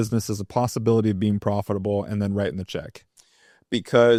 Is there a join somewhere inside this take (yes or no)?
no